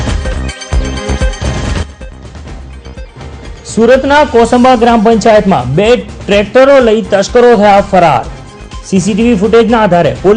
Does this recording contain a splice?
no; 0 cuts

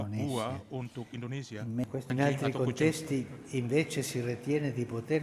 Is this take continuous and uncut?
no; 1 cut; at 1.8 s

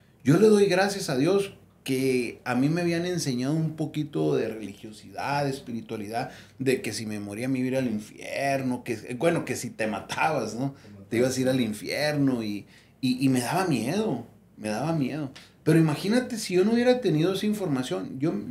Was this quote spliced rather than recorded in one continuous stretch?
no; 0 cuts

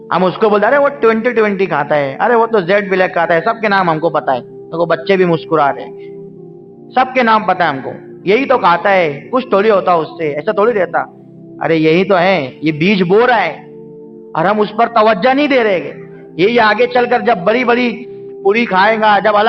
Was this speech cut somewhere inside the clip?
no; 0 cuts

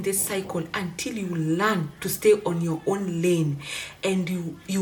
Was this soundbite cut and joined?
no; 0 cuts

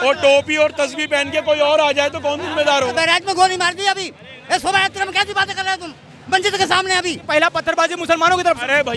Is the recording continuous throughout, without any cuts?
no; 2 cuts; at 2.9 s, 7.2 s

